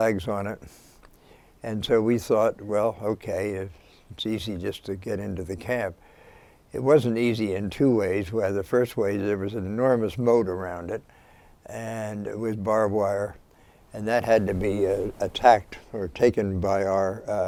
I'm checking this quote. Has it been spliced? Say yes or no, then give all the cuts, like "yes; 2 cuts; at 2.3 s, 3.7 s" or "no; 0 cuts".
no; 0 cuts